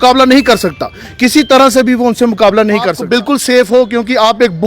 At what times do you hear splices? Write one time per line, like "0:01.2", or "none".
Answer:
0:03.0